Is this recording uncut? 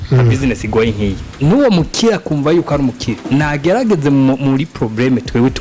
no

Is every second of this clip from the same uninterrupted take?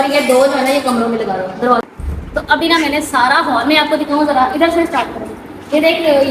no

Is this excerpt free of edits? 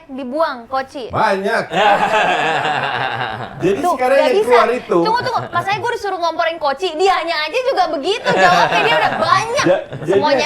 yes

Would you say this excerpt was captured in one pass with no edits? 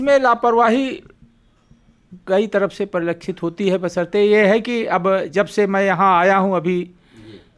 yes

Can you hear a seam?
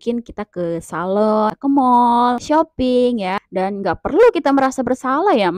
yes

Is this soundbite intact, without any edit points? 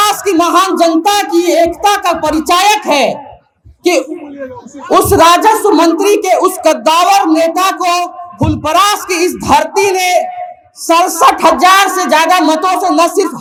yes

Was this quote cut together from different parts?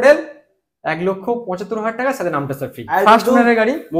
yes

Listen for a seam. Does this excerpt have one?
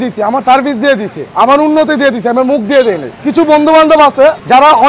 yes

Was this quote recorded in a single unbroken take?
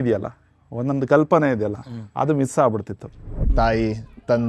no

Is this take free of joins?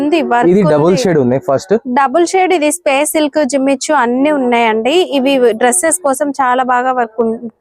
yes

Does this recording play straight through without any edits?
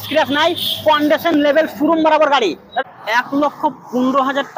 no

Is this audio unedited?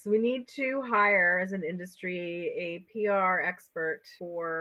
yes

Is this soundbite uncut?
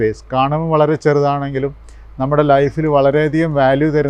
yes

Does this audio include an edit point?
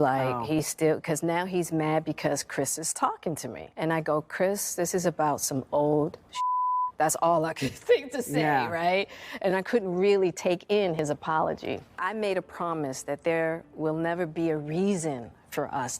yes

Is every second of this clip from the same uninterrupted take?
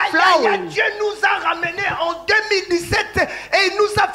yes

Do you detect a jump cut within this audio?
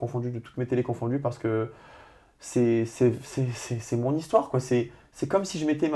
no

